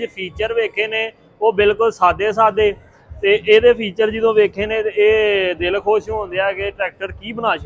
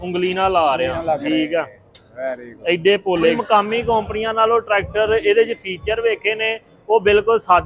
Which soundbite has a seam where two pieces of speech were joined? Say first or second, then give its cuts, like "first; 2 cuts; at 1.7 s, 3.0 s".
second; 2 cuts; at 1.0 s, 3.4 s